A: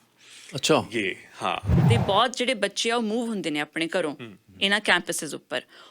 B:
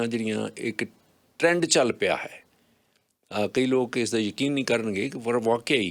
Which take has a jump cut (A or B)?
A